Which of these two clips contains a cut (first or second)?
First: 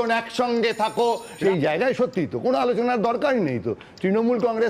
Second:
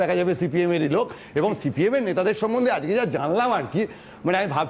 first